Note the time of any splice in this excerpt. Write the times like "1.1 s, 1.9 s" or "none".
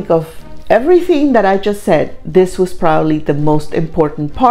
none